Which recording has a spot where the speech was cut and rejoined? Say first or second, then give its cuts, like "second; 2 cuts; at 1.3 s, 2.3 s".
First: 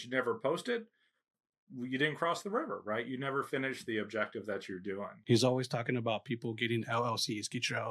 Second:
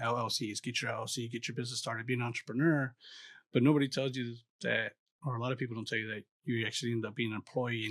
first; 2 cuts; at 1.6 s, 5.1 s